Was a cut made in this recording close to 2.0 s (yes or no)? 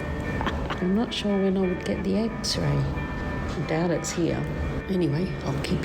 no